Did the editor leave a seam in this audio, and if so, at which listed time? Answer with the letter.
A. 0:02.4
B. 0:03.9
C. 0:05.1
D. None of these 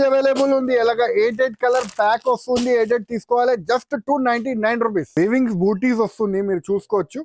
C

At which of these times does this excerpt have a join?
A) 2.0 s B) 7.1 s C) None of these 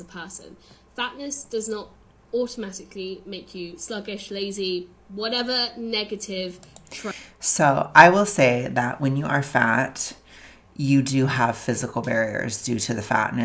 C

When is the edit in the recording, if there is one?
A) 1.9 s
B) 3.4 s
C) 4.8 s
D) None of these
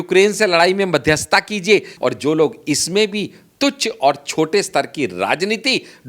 A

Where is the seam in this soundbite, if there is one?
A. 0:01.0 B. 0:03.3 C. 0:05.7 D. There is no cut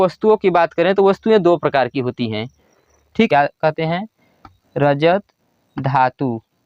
B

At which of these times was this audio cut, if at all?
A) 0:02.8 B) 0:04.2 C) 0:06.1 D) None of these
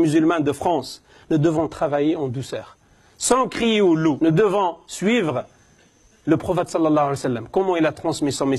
B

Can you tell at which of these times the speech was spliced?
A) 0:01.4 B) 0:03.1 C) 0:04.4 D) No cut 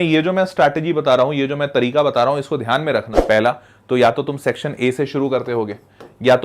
B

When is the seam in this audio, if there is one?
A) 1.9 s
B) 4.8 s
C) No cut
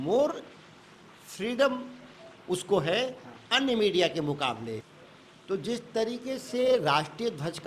B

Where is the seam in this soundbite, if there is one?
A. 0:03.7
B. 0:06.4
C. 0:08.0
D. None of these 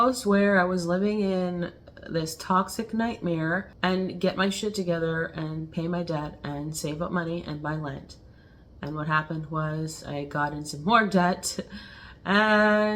A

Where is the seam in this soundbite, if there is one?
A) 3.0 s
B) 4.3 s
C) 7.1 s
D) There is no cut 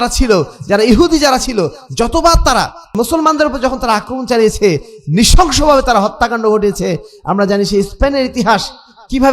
A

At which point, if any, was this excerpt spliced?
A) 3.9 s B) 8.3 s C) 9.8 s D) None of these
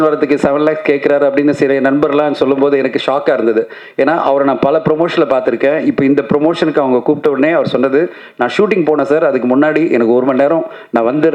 D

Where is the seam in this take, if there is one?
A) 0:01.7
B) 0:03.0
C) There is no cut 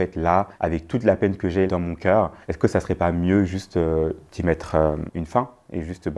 A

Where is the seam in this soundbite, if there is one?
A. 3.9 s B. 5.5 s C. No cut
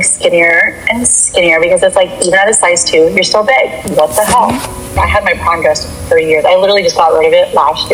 C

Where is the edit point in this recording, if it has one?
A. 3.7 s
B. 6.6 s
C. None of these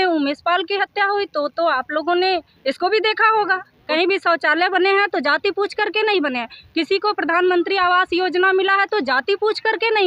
A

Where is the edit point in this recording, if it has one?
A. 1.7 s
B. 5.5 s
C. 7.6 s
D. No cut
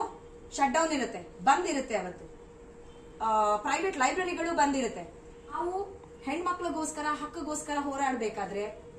B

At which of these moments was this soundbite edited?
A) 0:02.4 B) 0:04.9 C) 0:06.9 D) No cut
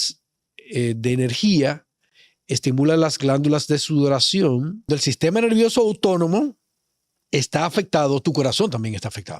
B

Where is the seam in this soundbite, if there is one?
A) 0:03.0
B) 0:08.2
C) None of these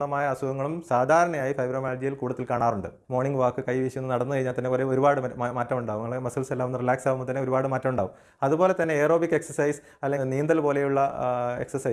A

